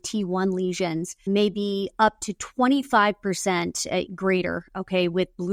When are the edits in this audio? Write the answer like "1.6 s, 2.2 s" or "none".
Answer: none